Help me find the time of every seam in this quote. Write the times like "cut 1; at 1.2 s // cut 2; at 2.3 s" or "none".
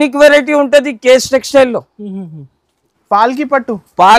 cut 1; at 2.9 s